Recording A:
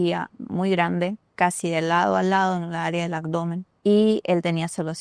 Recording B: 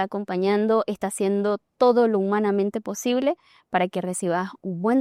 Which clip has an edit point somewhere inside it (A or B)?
A